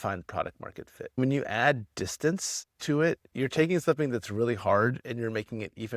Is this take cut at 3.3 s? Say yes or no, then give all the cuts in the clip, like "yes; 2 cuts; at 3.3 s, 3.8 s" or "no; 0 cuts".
no; 2 cuts; at 1.2 s, 5.0 s